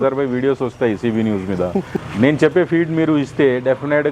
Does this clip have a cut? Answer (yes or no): yes